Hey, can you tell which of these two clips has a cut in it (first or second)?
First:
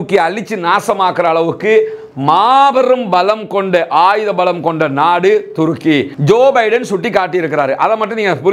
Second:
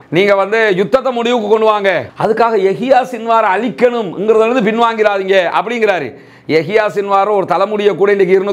first